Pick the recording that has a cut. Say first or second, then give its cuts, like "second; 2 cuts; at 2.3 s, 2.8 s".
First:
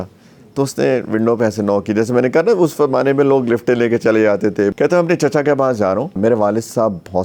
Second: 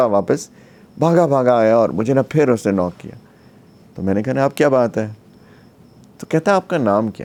first; 2 cuts; at 4.7 s, 6.2 s